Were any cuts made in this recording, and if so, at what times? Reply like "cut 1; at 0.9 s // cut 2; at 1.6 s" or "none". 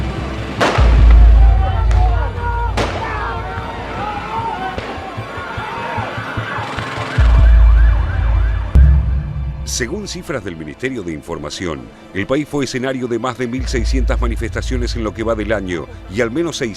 none